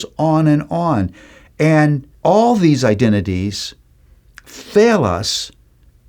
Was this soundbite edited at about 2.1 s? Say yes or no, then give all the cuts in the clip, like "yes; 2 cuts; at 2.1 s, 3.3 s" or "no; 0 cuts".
yes; 1 cut; at 2.1 s